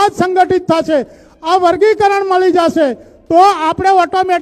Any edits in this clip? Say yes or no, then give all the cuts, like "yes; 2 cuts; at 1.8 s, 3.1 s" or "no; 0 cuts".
no; 0 cuts